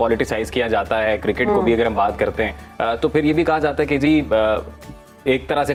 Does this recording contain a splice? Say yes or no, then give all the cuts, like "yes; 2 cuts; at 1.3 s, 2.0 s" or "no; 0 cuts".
no; 0 cuts